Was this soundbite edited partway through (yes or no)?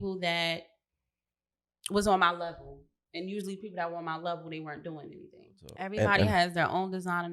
yes